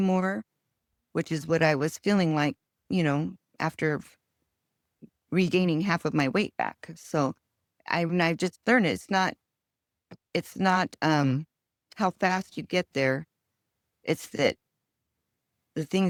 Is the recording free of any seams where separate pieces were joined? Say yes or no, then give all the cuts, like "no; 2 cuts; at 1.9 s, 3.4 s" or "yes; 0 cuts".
yes; 0 cuts